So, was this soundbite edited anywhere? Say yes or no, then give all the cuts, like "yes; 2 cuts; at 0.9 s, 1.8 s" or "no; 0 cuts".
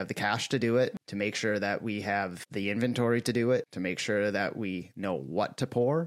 yes; 3 cuts; at 1.0 s, 2.4 s, 3.7 s